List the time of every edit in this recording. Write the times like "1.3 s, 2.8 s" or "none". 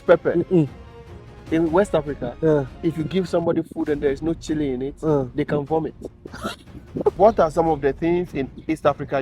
7.1 s